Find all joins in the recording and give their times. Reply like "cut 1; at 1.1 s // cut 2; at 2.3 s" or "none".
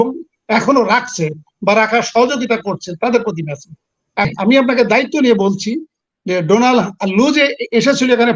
cut 1; at 4.3 s

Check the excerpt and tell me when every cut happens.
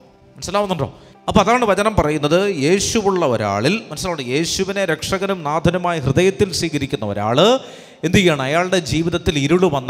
cut 1; at 1.1 s

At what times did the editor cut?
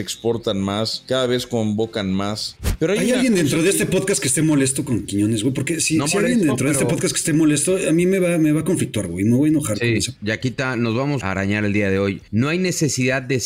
cut 1; at 1.0 s // cut 2; at 3.0 s // cut 3; at 9.8 s // cut 4; at 11.2 s // cut 5; at 12.2 s

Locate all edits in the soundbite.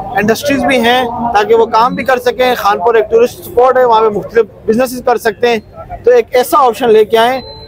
none

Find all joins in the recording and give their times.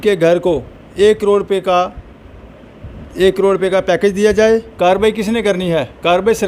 cut 1; at 4.7 s

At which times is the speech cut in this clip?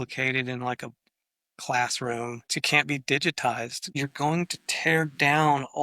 cut 1; at 2.6 s // cut 2; at 3.8 s

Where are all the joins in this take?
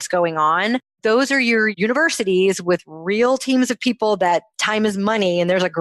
cut 1; at 0.9 s // cut 2; at 1.7 s

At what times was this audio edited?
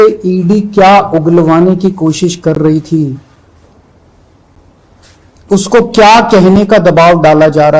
none

